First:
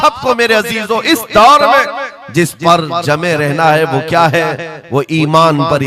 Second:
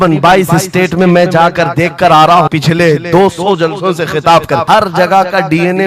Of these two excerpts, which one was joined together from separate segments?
second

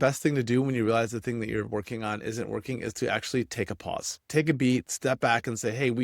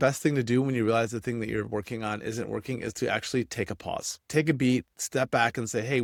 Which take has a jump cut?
first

